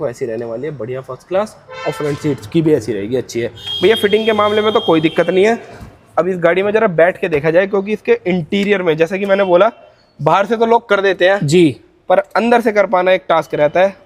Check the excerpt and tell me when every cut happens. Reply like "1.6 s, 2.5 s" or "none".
none